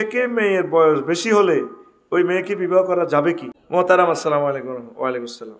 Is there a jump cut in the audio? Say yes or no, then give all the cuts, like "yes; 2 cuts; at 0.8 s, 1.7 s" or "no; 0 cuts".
yes; 1 cut; at 3.5 s